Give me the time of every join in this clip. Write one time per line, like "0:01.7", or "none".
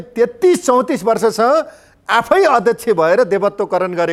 none